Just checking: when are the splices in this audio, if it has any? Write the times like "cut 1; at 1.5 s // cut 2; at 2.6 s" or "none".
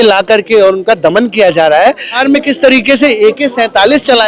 cut 1; at 2.2 s

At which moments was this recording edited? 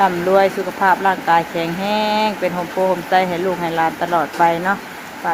none

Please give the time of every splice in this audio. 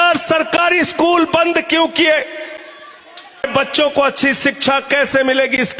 cut 1; at 3.4 s

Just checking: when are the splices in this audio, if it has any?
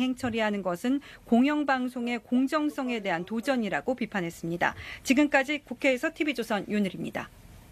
none

